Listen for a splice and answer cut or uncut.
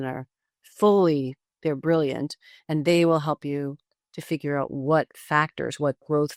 uncut